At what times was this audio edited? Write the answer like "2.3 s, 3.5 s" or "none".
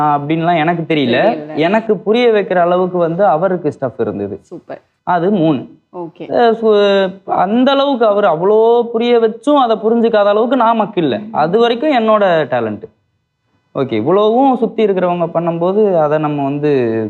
none